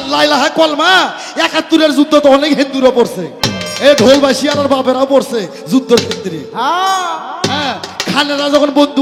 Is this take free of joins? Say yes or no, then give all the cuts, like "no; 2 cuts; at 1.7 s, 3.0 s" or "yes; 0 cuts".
yes; 0 cuts